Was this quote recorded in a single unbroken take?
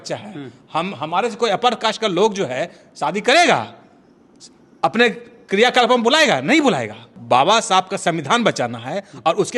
no; 1 cut; at 7.1 s

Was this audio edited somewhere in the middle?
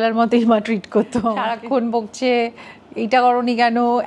yes; 1 cut; at 1.4 s

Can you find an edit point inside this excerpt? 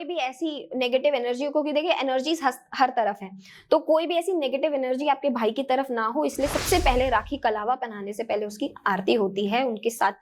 no; 0 cuts

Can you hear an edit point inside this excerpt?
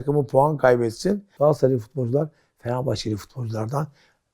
yes; 1 cut; at 1.3 s

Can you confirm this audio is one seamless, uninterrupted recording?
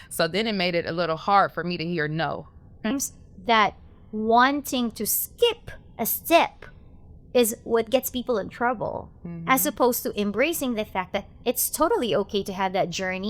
no; 1 cut; at 2.9 s

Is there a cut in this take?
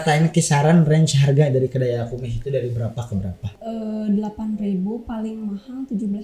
yes; 1 cut; at 3.5 s

